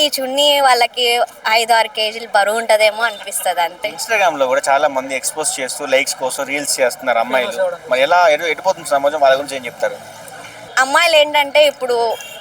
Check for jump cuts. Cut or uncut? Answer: uncut